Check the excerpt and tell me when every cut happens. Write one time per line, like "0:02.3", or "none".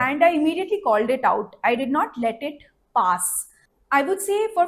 0:03.7